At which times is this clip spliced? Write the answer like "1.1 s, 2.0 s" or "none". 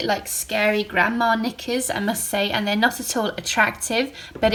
none